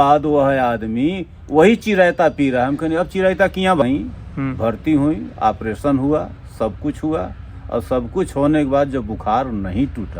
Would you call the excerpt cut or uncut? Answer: cut